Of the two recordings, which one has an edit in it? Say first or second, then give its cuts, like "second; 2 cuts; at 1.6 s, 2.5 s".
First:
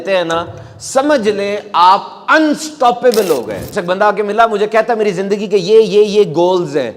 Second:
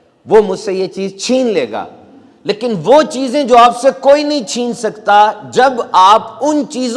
first; 1 cut; at 3.7 s